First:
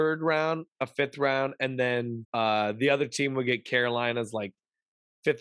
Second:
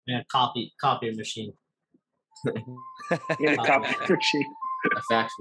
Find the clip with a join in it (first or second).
first